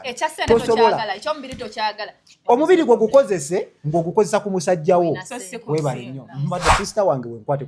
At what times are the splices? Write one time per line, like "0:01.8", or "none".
0:06.7